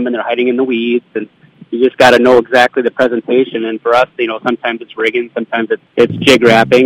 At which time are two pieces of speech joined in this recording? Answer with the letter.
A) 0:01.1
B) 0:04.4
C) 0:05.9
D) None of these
C